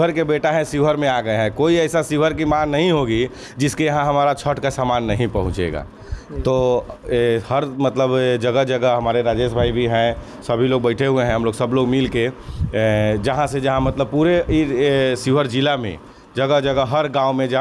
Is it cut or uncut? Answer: uncut